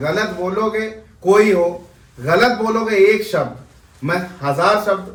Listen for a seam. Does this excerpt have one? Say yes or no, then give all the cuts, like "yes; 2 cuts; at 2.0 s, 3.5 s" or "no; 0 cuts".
no; 0 cuts